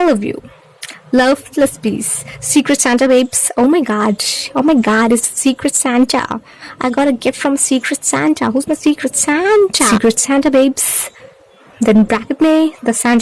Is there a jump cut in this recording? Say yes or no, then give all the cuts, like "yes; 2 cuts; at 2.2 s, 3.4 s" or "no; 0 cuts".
yes; 1 cut; at 9.9 s